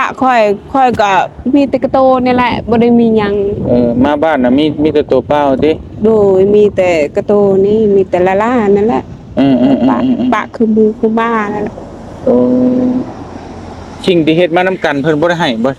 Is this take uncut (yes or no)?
yes